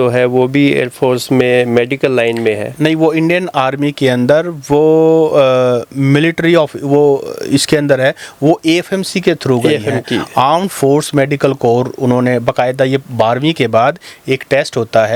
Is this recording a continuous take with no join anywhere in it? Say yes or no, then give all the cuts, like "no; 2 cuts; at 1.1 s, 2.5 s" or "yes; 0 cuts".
yes; 0 cuts